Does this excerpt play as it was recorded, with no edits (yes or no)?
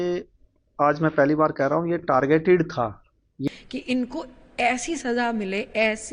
no